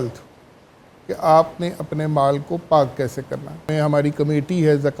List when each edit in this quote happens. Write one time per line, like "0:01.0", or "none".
0:03.7

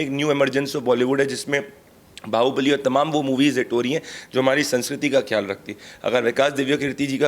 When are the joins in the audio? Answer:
none

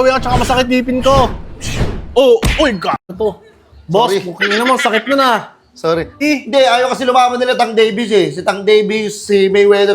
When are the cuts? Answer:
0:06.2

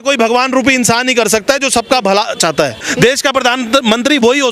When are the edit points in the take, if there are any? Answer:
0:02.8

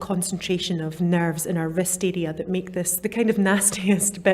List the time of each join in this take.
0:01.0
0:02.9

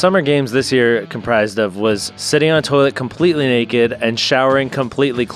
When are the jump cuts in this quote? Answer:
0:02.1

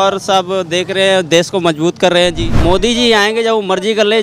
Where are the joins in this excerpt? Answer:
0:02.5

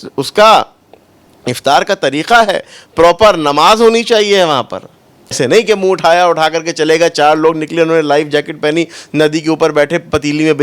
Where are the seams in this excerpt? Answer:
0:05.4

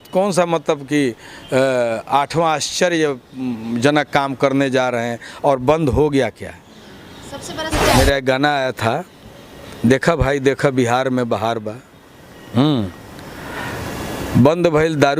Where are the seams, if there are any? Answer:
0:07.9

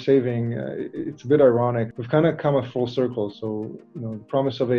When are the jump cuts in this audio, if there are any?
0:01.9

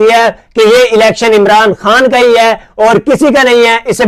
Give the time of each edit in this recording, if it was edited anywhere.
none

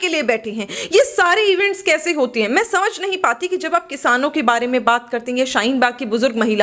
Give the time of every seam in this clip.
none

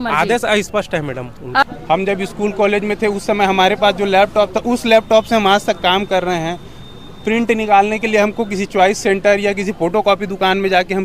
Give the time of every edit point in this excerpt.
0:01.6

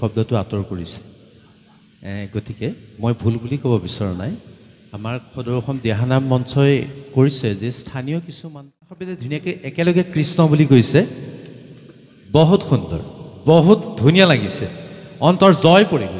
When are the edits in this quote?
0:09.2

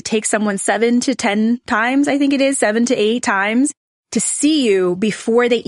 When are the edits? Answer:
none

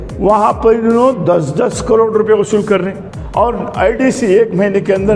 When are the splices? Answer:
0:03.1

